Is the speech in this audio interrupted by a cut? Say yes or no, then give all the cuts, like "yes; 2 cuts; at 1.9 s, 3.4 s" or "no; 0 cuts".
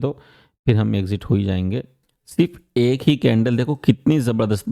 yes; 1 cut; at 1.9 s